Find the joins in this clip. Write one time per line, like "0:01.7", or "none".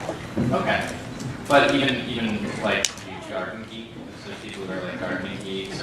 0:04.7